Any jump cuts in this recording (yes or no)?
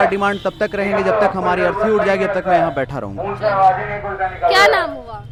no